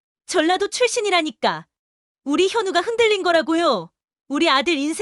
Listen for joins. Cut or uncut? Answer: uncut